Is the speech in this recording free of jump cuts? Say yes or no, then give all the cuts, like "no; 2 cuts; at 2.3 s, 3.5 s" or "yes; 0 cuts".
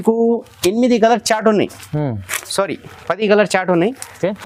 yes; 0 cuts